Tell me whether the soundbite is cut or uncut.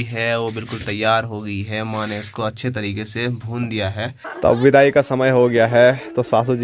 cut